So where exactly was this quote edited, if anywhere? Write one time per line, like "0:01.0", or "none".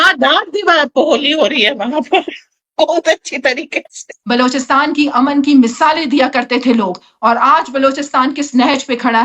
0:04.1